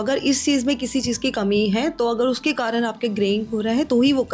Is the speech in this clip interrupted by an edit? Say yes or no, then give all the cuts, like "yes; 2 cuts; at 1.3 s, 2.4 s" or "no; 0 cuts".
no; 0 cuts